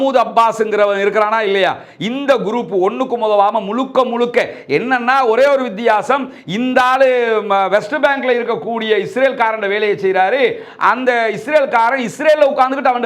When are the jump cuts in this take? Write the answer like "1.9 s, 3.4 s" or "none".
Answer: none